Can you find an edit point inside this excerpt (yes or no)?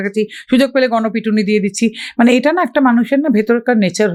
no